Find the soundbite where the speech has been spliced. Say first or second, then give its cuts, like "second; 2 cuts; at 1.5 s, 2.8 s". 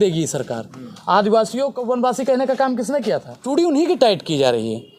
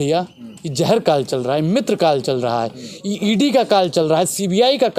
first; 2 cuts; at 1.8 s, 3.3 s